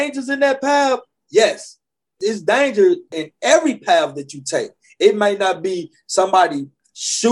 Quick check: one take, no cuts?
no; 2 cuts; at 2.1 s, 3.1 s

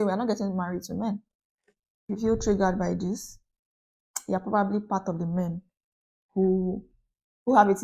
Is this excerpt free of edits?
no; 1 cut; at 2.1 s

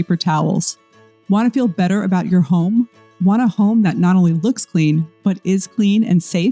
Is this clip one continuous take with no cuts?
yes; 0 cuts

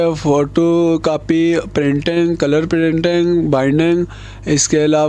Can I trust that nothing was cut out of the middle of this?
yes; 0 cuts

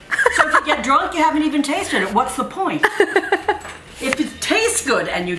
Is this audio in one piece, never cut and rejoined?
yes; 0 cuts

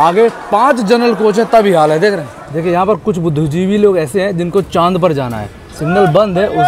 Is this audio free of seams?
no; 1 cut; at 2.5 s

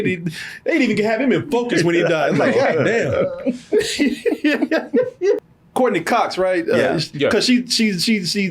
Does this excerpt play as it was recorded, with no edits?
no; 1 cut; at 5.4 s

